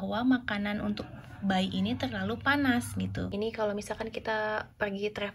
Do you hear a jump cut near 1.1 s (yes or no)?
no